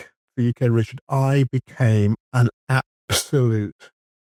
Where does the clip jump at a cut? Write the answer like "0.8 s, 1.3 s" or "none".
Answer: none